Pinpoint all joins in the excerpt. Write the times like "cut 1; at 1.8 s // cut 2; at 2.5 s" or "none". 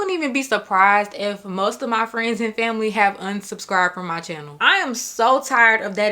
cut 1; at 4.6 s